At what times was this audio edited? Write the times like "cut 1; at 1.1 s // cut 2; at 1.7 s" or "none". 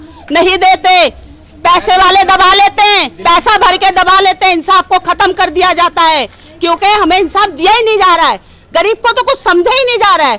none